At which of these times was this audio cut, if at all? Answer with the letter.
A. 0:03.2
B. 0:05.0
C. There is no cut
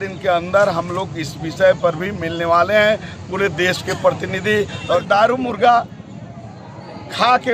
B